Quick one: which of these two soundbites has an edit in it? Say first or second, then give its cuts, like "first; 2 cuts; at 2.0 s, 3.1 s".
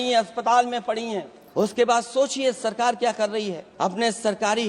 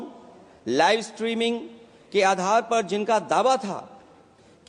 first; 2 cuts; at 1.4 s, 3.6 s